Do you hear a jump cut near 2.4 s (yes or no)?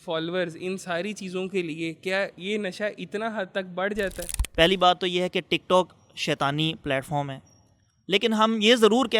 yes